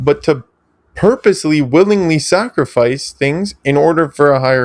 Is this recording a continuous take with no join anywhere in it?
yes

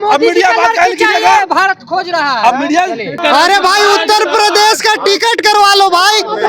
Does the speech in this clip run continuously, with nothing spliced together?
no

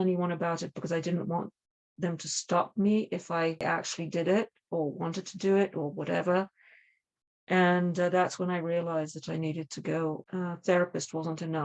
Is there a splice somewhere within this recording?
yes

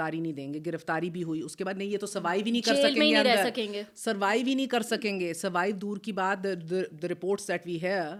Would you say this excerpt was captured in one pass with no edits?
yes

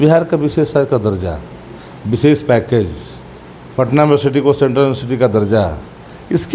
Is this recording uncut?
yes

